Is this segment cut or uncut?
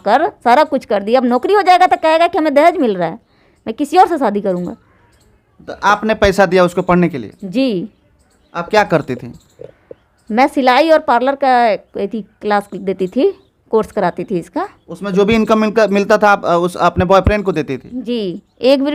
uncut